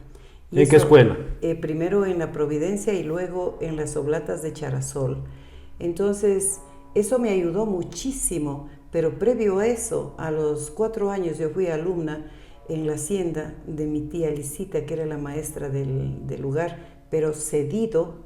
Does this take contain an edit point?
no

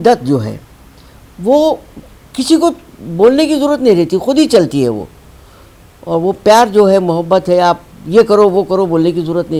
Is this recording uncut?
yes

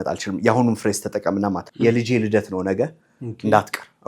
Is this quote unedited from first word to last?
no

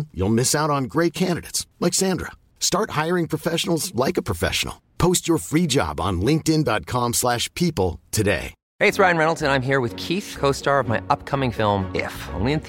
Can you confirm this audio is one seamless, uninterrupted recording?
no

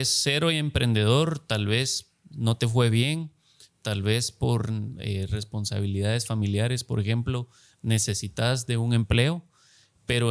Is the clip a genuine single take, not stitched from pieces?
yes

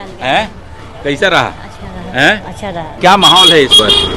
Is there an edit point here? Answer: yes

